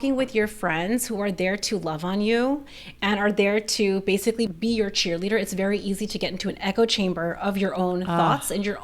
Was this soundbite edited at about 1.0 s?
no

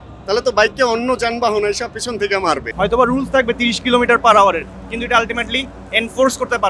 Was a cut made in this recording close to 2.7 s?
yes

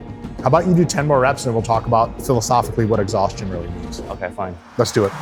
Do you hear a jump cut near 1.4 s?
no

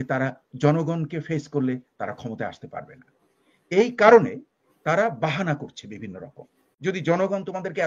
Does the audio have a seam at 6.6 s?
yes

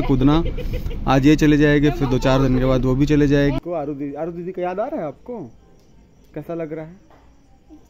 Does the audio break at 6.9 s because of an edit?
no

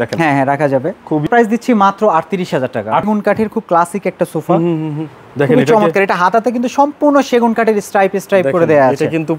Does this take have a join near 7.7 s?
no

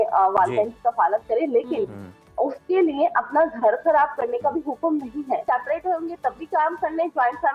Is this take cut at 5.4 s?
yes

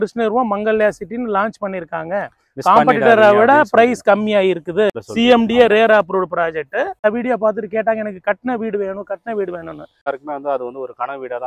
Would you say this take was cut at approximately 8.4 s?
no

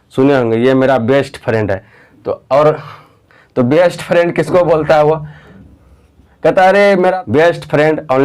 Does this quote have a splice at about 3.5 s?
no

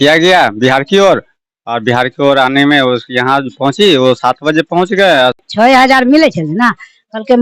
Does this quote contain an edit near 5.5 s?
yes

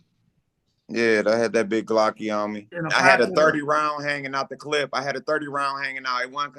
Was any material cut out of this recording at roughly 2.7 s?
yes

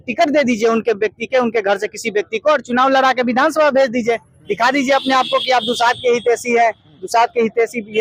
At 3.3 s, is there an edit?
no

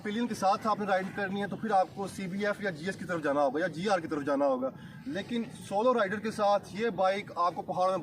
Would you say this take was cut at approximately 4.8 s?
no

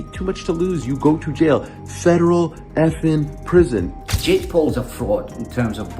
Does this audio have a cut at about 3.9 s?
yes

